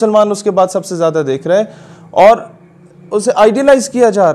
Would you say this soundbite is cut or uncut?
uncut